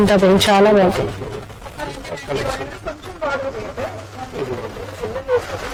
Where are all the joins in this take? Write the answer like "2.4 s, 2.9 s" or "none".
none